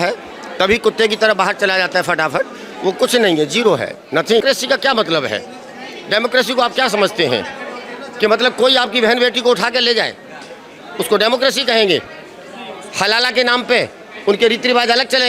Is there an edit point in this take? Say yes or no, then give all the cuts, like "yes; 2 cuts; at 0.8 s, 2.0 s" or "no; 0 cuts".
yes; 1 cut; at 4.4 s